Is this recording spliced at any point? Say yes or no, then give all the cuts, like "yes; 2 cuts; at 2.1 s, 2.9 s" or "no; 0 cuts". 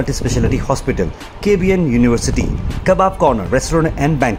no; 0 cuts